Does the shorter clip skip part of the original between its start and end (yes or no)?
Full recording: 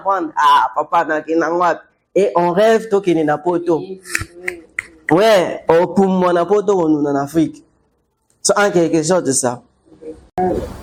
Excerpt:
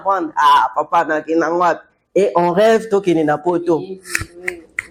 no